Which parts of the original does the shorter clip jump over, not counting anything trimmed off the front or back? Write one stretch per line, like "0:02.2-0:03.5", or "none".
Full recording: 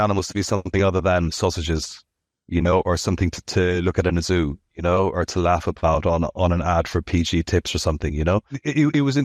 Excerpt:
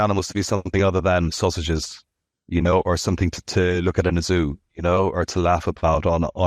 none